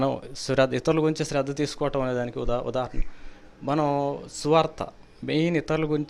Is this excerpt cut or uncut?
uncut